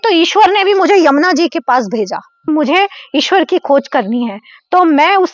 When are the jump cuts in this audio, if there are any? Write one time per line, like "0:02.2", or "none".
0:02.5